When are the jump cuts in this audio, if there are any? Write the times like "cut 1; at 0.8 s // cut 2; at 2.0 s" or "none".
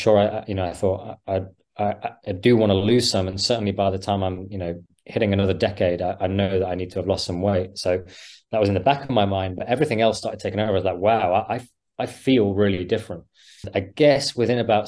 cut 1; at 13.6 s